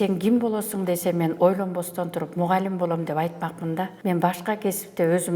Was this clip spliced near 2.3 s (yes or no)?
no